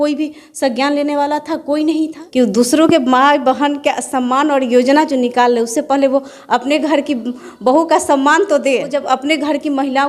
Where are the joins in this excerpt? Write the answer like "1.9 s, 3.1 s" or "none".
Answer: 2.2 s, 8.9 s